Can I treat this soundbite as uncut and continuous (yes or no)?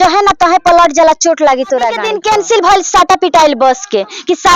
no